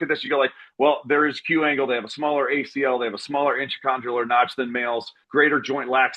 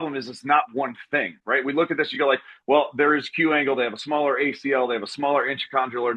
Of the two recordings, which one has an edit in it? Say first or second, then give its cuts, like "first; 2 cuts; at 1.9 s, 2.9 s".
first; 1 cut; at 5.2 s